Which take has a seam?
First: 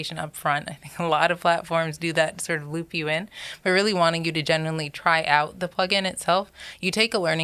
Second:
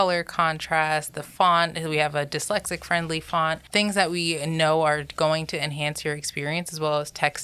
second; 1 cut; at 3.6 s

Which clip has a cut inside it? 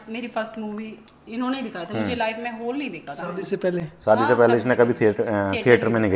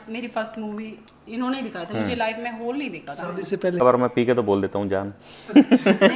second; 1 cut; at 3.8 s

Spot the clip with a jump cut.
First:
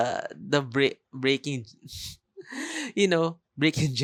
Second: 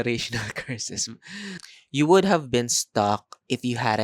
second; 1 cut; at 1.7 s

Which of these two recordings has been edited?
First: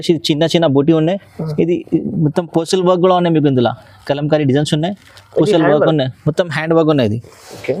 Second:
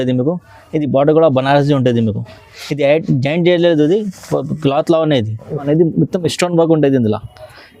second; 1 cut; at 5.7 s

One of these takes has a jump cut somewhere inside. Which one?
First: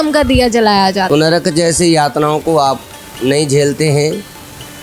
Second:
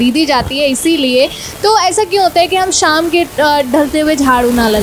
first; 1 cut; at 1.1 s

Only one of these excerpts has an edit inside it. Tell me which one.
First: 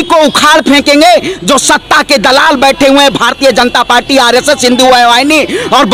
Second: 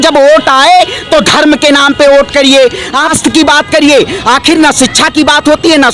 second; 1 cut; at 3.1 s

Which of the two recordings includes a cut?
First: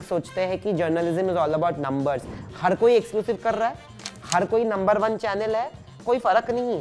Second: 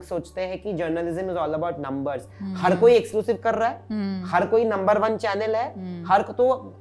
first; 1 cut; at 5.9 s

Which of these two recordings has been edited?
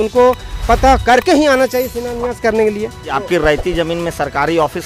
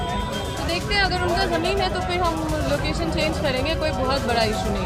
first; 1 cut; at 3.2 s

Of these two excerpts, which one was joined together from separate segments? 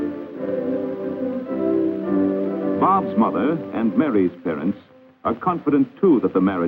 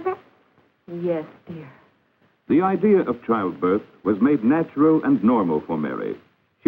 second; 1 cut; at 1.8 s

